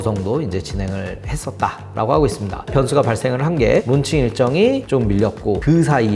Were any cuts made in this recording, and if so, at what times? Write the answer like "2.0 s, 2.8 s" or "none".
2.7 s, 3.9 s